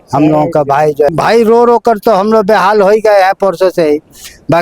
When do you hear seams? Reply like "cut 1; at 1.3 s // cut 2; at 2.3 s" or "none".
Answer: cut 1; at 1.1 s